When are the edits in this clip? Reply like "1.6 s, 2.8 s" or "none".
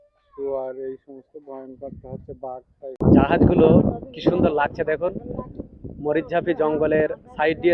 3.0 s